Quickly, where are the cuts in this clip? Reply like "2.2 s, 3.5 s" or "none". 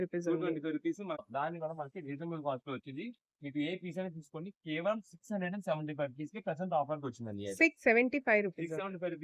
1.2 s